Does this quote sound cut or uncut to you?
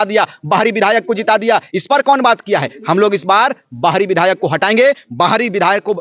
uncut